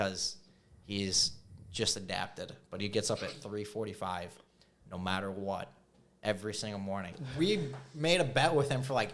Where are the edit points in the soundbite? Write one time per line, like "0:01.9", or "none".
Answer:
0:07.2

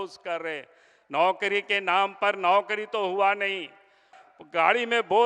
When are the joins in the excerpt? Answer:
0:04.1

